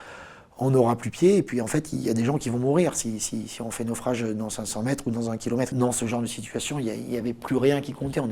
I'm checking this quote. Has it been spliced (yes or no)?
yes